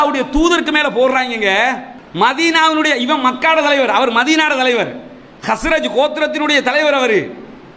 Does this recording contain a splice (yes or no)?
yes